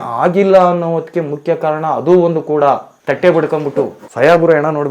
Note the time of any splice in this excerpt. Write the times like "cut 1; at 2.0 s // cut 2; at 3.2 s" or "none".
cut 1; at 2.9 s // cut 2; at 4.0 s